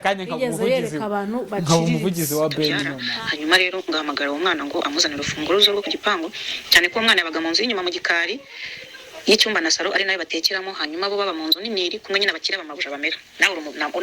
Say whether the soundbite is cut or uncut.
cut